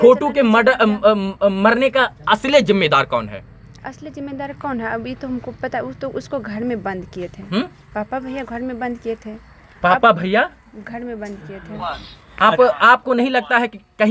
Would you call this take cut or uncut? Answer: uncut